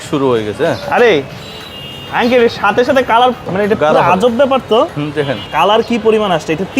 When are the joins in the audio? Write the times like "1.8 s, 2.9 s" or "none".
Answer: 3.5 s, 5.5 s